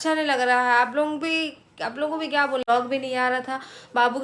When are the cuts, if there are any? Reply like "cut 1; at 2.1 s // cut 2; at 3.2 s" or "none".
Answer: cut 1; at 2.6 s